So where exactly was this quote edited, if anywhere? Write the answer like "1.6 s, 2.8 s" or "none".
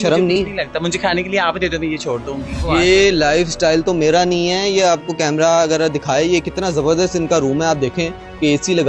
2.6 s